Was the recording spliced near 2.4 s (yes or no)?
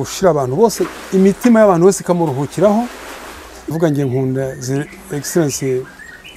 no